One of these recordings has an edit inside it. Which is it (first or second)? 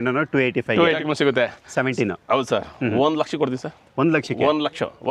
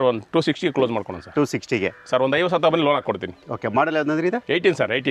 first